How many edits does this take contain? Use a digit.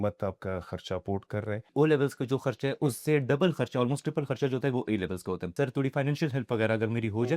2